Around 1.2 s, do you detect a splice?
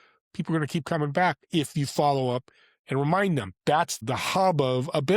no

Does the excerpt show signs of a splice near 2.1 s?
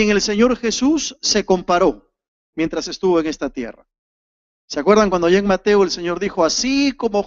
yes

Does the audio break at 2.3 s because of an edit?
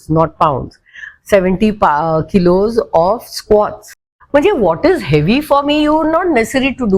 no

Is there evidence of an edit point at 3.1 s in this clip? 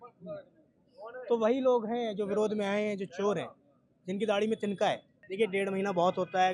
no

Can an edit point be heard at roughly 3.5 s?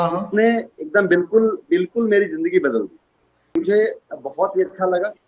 yes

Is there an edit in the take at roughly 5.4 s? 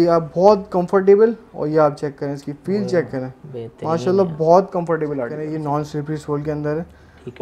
yes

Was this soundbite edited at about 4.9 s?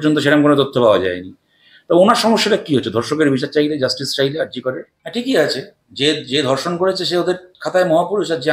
yes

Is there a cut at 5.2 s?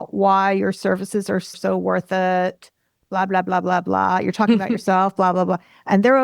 no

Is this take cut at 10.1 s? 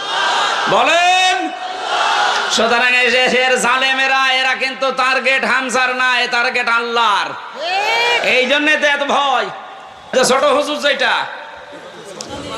yes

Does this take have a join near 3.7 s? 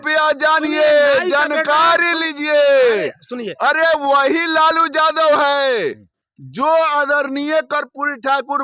no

